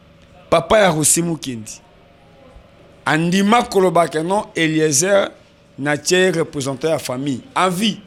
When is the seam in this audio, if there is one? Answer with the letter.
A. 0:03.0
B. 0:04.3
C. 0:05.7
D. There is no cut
D